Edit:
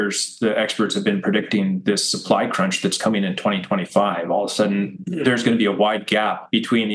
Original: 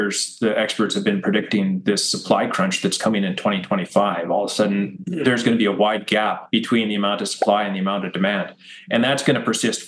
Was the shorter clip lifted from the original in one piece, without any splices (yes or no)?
yes